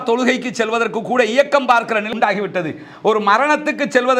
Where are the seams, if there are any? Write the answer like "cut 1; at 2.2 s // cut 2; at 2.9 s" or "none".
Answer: cut 1; at 2.1 s